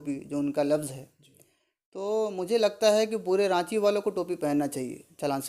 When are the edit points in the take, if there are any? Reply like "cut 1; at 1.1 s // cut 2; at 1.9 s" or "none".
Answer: none